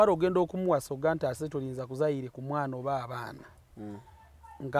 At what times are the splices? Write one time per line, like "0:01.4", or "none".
none